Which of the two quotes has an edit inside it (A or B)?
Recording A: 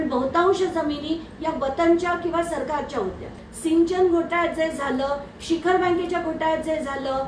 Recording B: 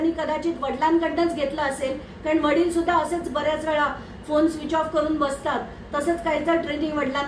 A